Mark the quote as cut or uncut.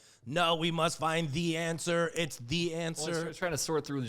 uncut